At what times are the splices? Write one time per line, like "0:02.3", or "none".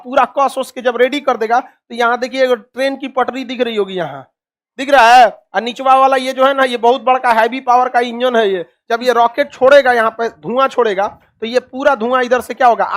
0:08.7